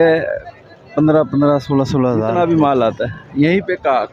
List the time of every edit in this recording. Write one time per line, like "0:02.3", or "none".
0:02.3